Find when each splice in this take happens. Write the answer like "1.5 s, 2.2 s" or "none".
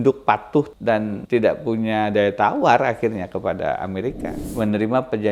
1.1 s, 4.5 s